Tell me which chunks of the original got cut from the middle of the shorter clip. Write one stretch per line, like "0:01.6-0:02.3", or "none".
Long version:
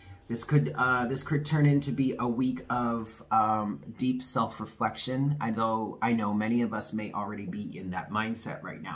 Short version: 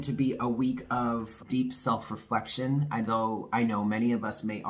0:03.2-0:03.9